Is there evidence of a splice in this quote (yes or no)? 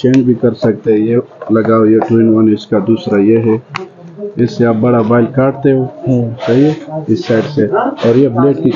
no